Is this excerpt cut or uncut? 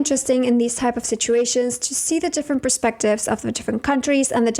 uncut